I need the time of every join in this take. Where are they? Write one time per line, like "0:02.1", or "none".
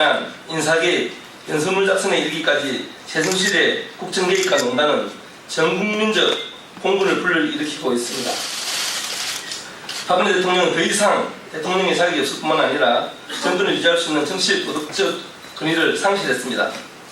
0:13.6